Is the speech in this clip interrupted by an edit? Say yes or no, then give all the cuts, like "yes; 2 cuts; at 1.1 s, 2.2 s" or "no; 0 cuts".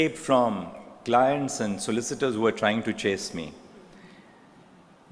no; 0 cuts